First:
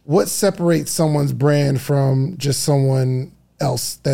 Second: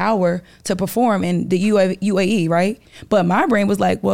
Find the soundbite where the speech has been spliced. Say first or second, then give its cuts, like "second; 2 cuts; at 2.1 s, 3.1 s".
second; 1 cut; at 2.9 s